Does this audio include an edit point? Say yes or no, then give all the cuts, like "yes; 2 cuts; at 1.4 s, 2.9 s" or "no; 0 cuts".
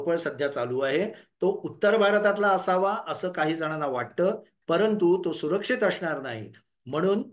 no; 0 cuts